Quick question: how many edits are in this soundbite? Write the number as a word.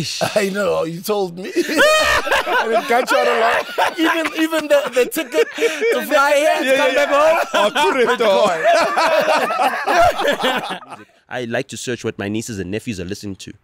one